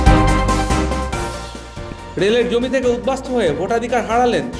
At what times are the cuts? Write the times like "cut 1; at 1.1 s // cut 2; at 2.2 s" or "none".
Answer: cut 1; at 1.9 s

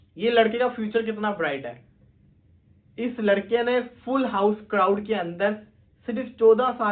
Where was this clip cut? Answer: none

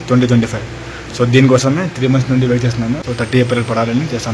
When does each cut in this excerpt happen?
cut 1; at 3.1 s

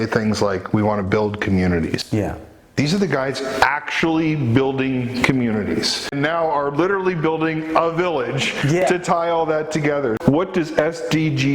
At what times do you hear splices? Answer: cut 1; at 6.1 s // cut 2; at 10.2 s

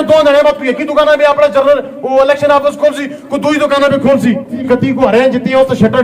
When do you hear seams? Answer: cut 1; at 4.7 s

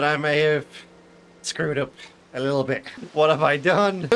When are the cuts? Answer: cut 1; at 3.0 s

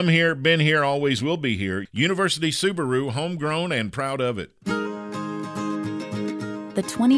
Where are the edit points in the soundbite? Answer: cut 1; at 4.5 s

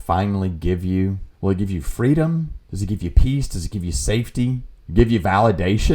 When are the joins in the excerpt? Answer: cut 1; at 1.3 s // cut 2; at 2.6 s // cut 3; at 4.7 s

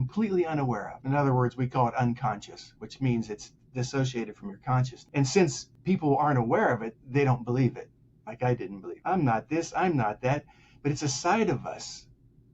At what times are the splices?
cut 1; at 0.9 s // cut 2; at 5.0 s // cut 3; at 5.7 s // cut 4; at 8.8 s

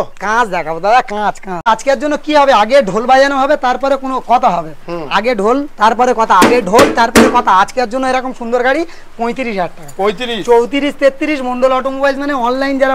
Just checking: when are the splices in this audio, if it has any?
cut 1; at 1.7 s

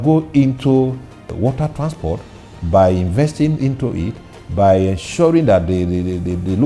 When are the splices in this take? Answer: cut 1; at 1.3 s

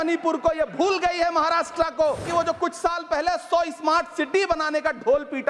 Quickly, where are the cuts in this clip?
cut 1; at 2.2 s

